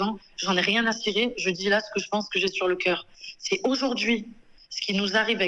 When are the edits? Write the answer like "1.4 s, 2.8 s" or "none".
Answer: none